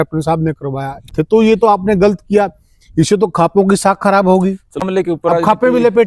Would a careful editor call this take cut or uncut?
cut